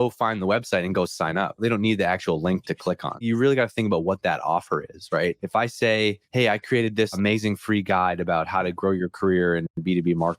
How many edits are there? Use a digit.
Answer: 5